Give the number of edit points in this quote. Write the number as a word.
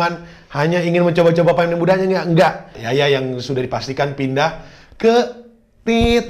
one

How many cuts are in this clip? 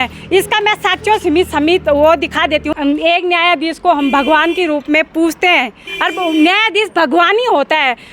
one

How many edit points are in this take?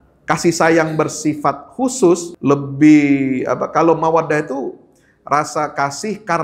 one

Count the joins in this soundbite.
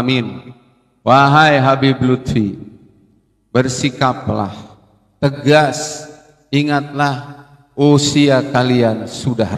zero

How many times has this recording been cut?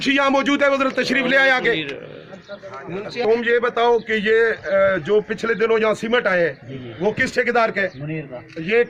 zero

